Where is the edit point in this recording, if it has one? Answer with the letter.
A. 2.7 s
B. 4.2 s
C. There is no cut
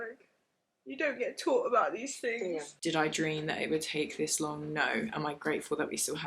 A